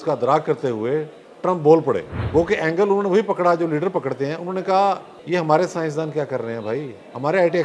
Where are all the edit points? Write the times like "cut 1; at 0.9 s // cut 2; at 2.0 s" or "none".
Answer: cut 1; at 2.1 s // cut 2; at 5.1 s